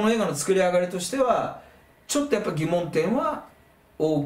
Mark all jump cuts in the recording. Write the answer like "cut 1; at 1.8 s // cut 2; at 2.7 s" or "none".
none